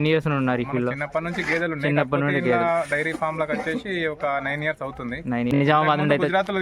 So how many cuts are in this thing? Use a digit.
1